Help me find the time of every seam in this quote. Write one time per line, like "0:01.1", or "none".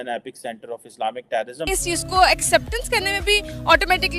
0:01.7